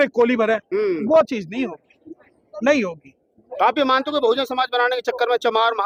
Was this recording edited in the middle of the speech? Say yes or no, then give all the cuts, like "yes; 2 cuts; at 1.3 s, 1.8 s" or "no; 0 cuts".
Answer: no; 0 cuts